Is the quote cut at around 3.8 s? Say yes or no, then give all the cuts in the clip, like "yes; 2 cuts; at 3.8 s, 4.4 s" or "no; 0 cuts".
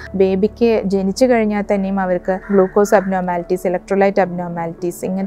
no; 1 cut; at 2.4 s